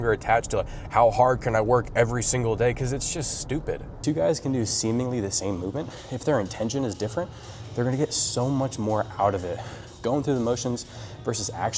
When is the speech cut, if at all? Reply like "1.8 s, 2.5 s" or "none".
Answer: 3.9 s, 6.0 s